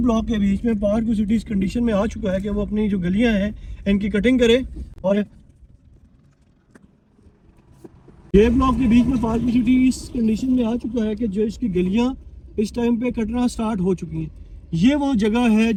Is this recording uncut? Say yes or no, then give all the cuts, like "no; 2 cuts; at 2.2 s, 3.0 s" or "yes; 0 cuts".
yes; 0 cuts